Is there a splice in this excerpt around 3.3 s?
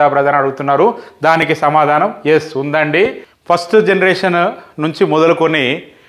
yes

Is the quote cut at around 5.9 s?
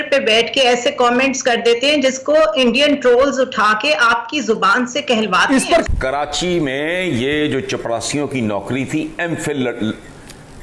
yes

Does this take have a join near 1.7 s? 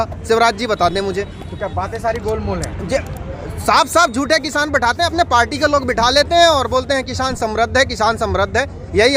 no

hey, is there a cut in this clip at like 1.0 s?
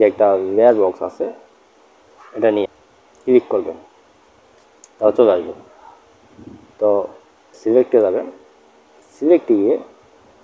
no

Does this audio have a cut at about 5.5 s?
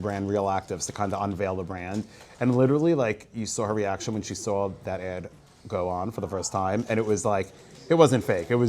no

